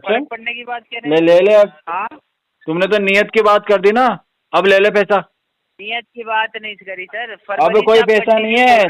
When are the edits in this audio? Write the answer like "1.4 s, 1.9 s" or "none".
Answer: none